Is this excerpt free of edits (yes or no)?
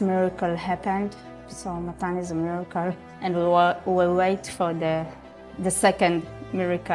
yes